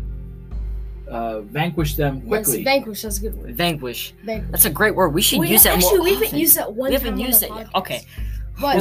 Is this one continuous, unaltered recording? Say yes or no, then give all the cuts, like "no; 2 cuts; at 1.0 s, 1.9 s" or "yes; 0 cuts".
no; 1 cut; at 0.9 s